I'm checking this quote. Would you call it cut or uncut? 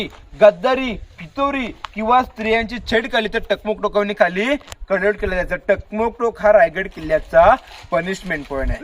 uncut